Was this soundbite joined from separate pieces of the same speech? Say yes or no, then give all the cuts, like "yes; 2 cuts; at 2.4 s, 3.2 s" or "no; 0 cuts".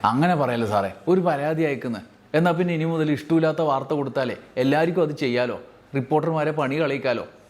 no; 0 cuts